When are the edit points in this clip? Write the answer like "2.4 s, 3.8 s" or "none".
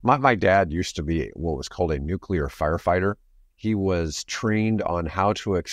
none